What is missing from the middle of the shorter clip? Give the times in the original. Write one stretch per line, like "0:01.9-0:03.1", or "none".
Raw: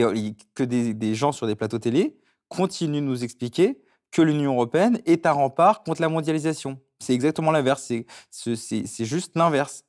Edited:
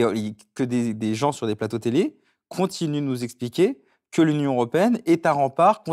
none

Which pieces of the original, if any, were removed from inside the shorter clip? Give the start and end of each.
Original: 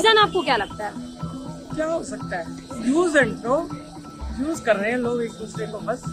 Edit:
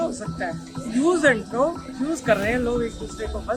0:03.8-0:04.2

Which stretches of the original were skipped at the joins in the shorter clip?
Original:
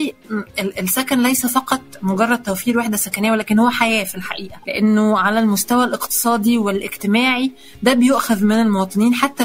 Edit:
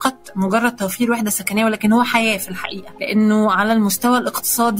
none

